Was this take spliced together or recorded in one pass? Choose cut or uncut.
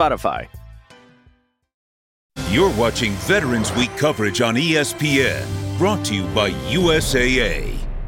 cut